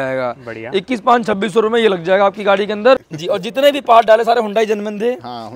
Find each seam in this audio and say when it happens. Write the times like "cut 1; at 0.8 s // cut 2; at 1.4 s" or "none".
cut 1; at 3.0 s